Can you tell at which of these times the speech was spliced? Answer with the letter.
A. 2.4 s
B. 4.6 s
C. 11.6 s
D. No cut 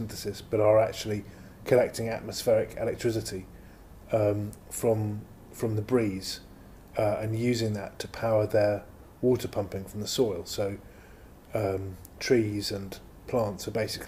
D